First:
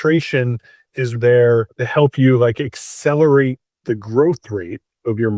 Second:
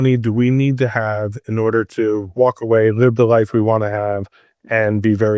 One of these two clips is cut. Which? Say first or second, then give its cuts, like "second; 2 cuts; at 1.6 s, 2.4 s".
first; 2 cuts; at 1.2 s, 1.8 s